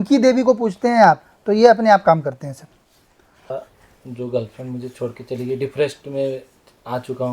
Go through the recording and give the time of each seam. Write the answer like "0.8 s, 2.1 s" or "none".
3.5 s